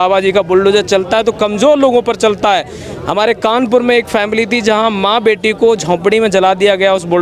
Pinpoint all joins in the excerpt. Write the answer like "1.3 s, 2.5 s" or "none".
none